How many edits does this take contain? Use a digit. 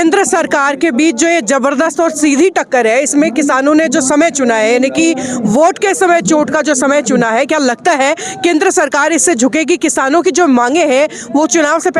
0